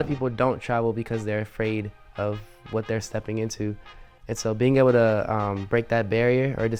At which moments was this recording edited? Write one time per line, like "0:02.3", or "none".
none